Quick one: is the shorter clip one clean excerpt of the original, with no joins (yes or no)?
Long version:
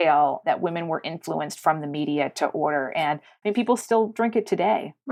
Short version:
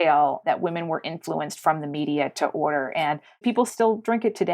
no